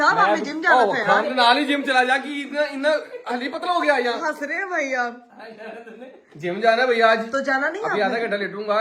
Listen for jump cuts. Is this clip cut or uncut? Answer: uncut